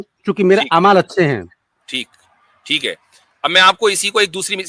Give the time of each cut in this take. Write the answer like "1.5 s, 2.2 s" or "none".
none